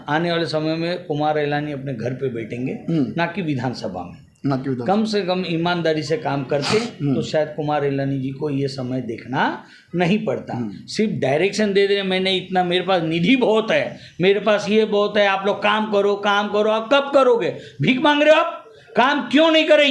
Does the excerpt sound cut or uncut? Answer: uncut